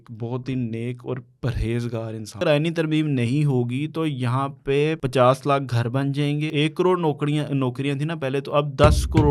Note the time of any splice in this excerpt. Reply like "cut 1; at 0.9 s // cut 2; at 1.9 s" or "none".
cut 1; at 2.4 s // cut 2; at 5.0 s // cut 3; at 6.5 s